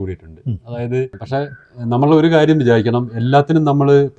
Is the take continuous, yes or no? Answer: no